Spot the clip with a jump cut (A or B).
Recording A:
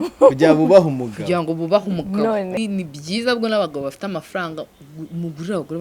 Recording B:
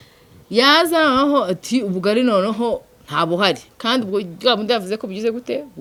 A